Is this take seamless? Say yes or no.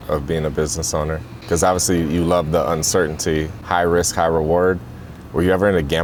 yes